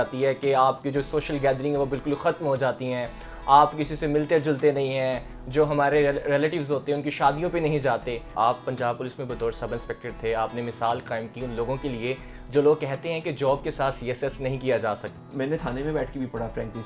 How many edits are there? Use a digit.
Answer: 2